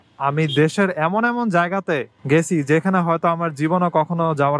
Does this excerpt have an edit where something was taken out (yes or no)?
no